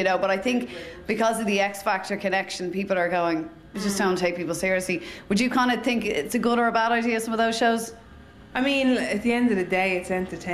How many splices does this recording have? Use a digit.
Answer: 1